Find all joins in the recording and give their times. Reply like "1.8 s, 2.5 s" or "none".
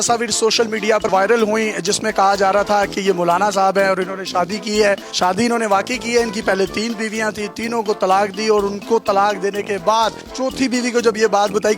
1.0 s